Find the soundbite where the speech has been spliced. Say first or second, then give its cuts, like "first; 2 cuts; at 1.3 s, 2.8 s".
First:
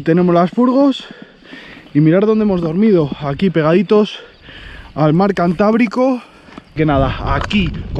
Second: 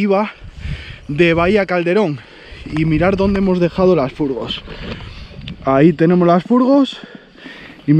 first; 1 cut; at 6.8 s